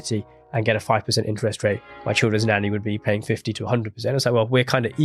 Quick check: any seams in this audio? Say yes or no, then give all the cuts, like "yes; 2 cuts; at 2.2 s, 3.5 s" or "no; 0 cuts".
no; 0 cuts